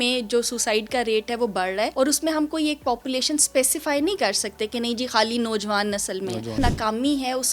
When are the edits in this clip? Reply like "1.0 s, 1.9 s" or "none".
1.9 s, 6.6 s